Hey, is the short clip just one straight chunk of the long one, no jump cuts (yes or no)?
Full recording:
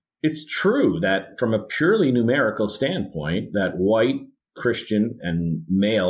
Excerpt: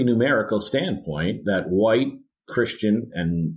yes